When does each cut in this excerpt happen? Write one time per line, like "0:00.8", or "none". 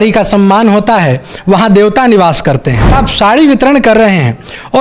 0:03.0